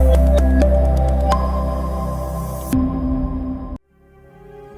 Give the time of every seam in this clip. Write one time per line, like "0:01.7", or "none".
0:03.8

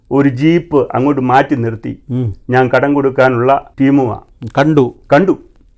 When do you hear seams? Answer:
0:03.7

